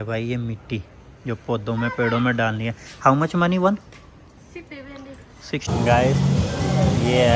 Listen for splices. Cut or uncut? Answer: cut